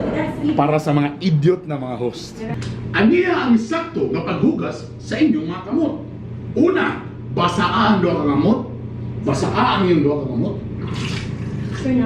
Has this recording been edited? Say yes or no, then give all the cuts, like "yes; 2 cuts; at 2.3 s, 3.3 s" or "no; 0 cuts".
yes; 1 cut; at 2.5 s